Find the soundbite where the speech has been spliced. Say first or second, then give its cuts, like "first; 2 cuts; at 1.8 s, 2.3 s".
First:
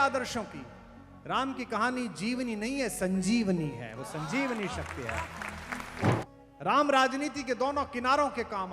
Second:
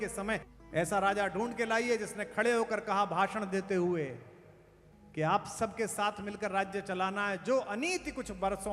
first; 1 cut; at 6.3 s